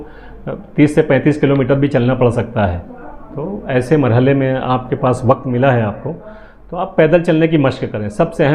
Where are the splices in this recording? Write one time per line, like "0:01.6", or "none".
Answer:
none

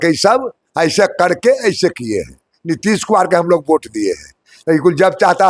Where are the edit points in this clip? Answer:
none

